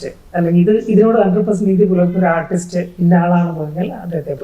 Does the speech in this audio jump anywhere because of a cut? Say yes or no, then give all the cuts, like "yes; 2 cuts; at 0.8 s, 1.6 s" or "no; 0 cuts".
yes; 1 cut; at 2.9 s